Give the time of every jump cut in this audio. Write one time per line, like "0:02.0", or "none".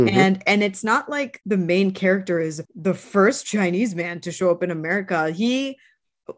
0:01.3
0:02.6